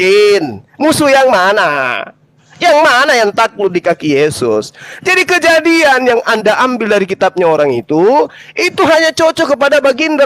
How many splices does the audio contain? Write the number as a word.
zero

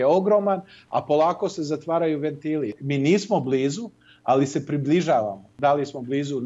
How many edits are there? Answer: two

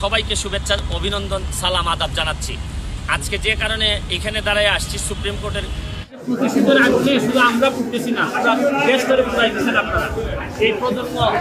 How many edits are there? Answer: one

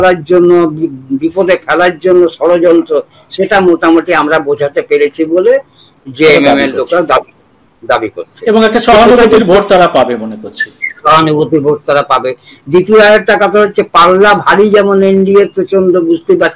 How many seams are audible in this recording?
zero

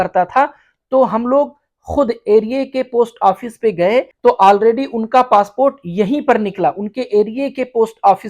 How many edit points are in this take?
one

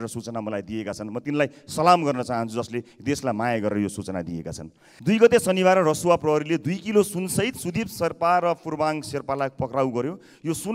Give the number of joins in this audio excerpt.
one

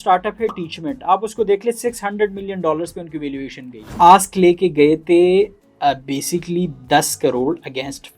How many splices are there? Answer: one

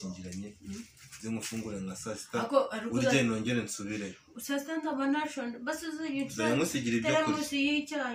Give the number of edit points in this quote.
zero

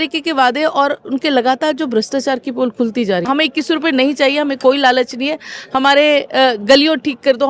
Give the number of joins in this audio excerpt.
one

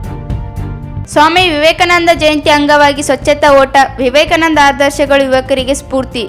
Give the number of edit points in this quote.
one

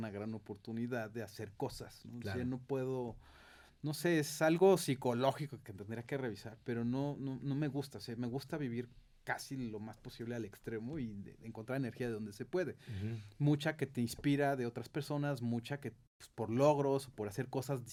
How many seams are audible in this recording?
zero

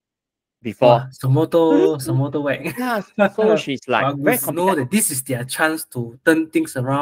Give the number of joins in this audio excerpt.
one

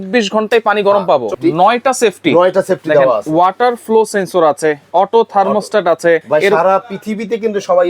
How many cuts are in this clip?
two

